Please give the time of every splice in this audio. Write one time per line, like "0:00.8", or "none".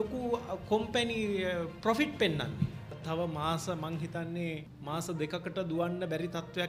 0:03.0
0:04.7